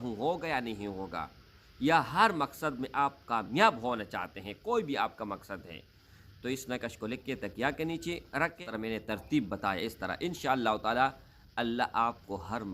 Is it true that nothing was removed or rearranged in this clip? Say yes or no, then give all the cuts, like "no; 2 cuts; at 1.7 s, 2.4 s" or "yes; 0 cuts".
no; 1 cut; at 8.6 s